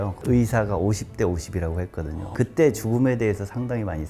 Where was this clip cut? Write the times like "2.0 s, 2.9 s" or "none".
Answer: 2.2 s